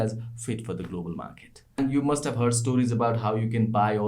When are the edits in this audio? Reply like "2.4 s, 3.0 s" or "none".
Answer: 1.8 s

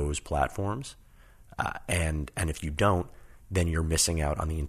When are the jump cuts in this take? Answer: none

